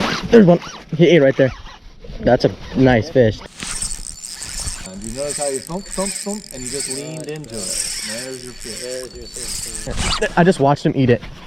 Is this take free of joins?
no; 3 cuts; at 3.4 s, 4.9 s, 9.8 s

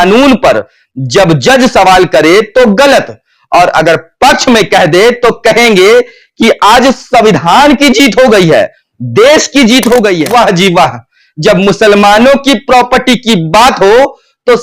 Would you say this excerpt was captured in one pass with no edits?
no; 1 cut; at 10.2 s

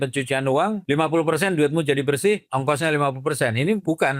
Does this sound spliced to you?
yes; 2 cuts; at 0.8 s, 2.4 s

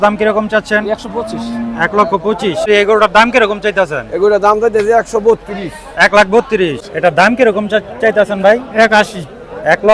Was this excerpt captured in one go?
no; 2 cuts; at 2.7 s, 6.9 s

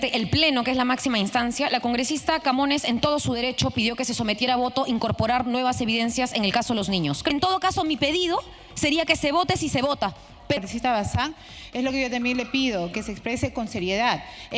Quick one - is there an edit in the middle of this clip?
yes; 2 cuts; at 7.3 s, 10.6 s

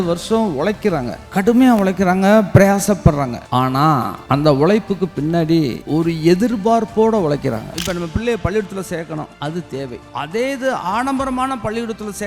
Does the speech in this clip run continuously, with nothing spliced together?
no; 5 cuts; at 1.2 s, 3.8 s, 5.8 s, 7.8 s, 9.6 s

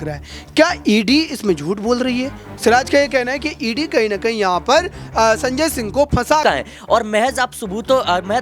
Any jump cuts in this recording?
yes; 1 cut; at 6.4 s

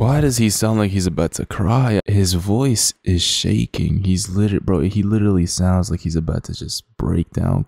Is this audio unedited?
no; 1 cut; at 2.0 s

